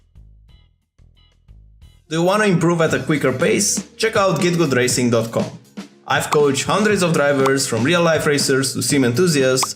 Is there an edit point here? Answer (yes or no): yes